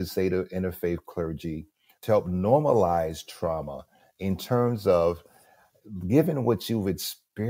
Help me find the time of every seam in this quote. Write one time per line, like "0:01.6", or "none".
0:02.0